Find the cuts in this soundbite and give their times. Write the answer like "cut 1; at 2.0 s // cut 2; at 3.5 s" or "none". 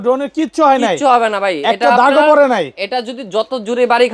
none